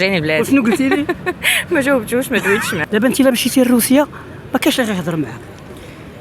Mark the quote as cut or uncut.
cut